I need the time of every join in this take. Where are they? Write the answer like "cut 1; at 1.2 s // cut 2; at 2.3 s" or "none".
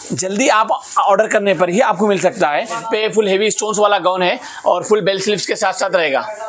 cut 1; at 2.8 s